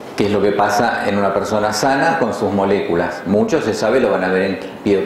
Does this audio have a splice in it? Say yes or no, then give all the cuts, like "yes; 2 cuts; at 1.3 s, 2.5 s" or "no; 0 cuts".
yes; 1 cut; at 4.0 s